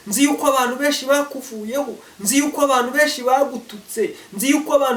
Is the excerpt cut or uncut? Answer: uncut